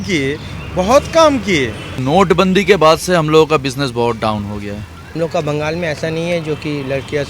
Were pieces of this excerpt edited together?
yes; 2 cuts; at 2.0 s, 5.0 s

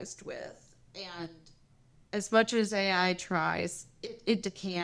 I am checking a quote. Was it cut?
no; 0 cuts

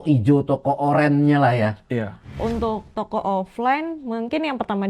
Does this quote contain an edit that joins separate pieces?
yes; 1 cut; at 2.4 s

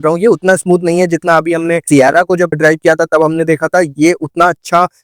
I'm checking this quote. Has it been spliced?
no; 0 cuts

